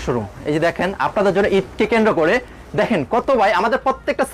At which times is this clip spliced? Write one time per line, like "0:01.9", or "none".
none